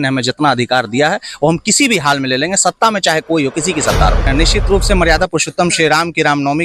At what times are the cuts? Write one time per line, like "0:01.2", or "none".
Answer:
0:04.2